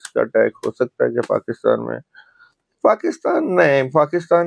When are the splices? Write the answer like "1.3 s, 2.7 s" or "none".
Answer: none